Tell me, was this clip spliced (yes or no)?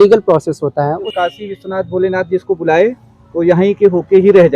yes